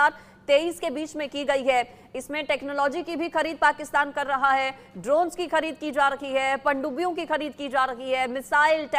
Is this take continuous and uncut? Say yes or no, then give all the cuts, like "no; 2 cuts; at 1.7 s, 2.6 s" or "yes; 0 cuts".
yes; 0 cuts